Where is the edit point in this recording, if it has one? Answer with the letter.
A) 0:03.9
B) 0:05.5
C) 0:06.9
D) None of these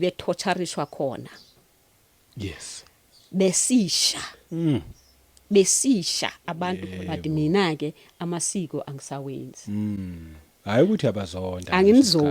C